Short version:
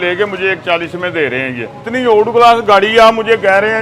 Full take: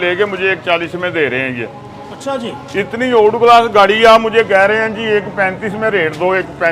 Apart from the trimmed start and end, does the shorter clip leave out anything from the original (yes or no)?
yes